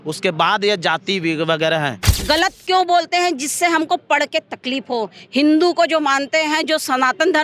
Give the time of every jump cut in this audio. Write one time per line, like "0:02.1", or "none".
0:02.1